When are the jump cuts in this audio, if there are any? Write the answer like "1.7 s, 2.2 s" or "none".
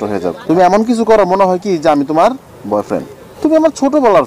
none